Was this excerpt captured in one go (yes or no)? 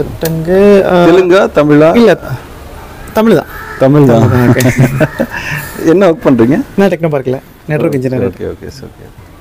yes